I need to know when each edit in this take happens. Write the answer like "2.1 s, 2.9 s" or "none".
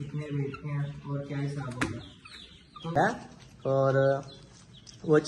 3.0 s